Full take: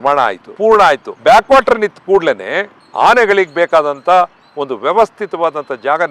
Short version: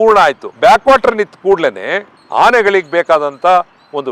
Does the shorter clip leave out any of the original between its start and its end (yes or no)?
no